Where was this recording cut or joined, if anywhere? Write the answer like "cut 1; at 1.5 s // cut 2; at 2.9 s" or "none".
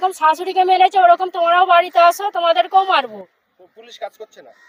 none